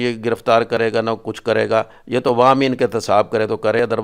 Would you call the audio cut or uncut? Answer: uncut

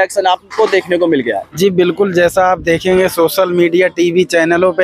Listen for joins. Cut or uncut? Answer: cut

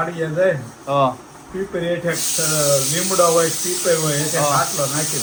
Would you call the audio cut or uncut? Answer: uncut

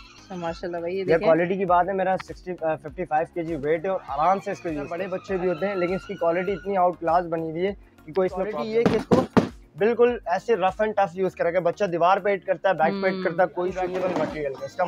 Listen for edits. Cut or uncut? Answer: cut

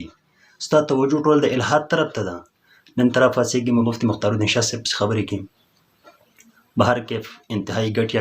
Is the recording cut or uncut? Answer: cut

